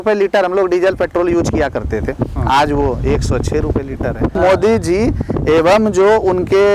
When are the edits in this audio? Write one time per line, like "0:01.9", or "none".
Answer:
0:04.4